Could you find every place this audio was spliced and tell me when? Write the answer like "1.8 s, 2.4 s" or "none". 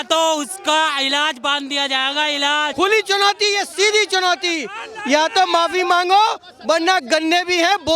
2.7 s